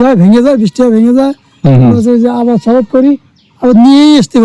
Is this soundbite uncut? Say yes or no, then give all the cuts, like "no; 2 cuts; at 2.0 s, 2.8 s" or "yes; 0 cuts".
yes; 0 cuts